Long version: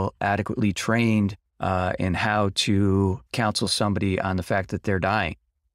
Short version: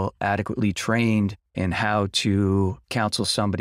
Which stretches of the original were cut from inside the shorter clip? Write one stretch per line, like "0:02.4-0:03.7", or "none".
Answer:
0:01.5-0:02.0